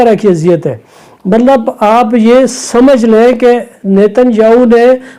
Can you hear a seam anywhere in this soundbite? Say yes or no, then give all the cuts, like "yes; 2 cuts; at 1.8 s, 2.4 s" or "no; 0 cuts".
no; 0 cuts